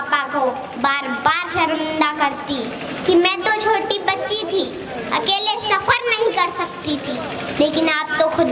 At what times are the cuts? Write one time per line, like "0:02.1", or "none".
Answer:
none